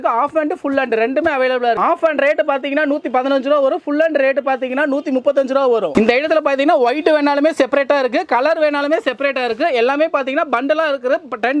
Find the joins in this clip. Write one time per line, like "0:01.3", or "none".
none